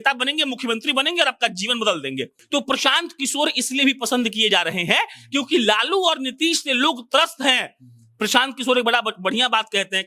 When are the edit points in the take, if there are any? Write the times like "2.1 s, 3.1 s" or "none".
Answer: 2.3 s